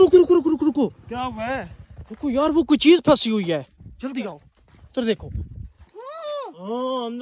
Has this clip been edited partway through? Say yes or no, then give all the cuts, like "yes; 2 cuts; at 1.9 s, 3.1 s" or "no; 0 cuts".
no; 0 cuts